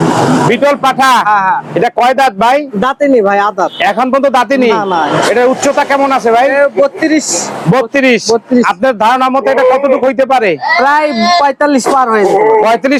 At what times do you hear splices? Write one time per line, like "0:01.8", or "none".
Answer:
none